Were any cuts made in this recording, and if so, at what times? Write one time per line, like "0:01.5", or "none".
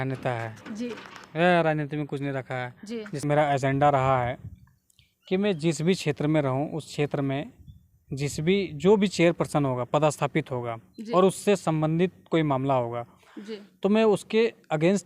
0:03.1